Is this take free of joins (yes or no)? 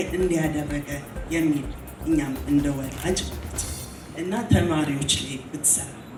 yes